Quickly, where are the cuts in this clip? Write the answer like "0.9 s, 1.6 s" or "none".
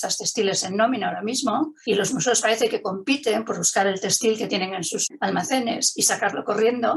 1.8 s, 5.0 s